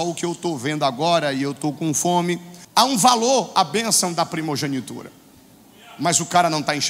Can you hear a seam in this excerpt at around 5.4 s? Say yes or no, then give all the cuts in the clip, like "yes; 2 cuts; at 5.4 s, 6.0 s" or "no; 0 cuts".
no; 1 cut; at 2.5 s